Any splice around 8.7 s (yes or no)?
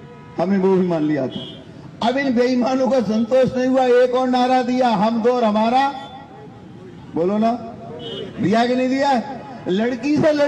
yes